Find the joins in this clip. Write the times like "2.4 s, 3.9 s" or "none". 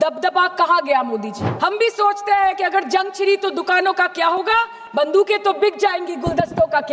1.4 s